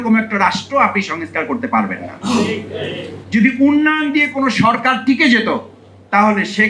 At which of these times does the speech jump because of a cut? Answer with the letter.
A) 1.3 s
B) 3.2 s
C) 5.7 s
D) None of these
B